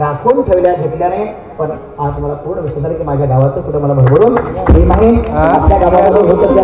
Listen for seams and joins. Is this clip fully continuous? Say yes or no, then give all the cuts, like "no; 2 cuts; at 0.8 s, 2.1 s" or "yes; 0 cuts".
yes; 0 cuts